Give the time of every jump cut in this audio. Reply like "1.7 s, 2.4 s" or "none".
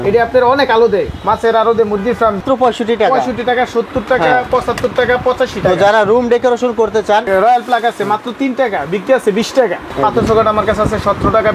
2.4 s, 7.3 s, 9.8 s

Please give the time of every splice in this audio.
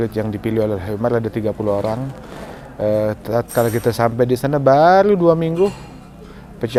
none

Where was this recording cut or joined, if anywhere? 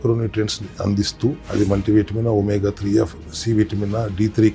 1.4 s

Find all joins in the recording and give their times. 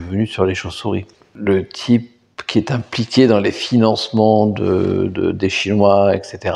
1.2 s

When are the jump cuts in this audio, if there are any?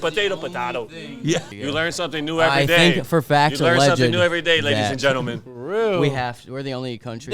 1.5 s

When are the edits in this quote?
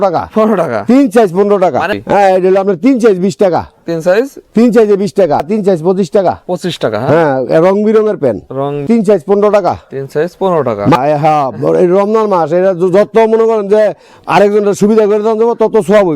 1.9 s, 5.5 s, 8.8 s, 10.9 s

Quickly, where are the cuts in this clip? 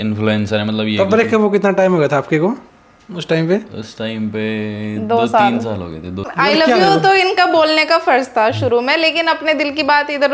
6.3 s

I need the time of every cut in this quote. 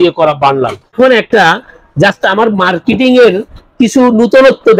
0.9 s

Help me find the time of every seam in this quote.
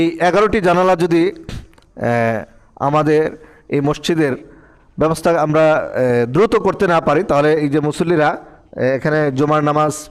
none

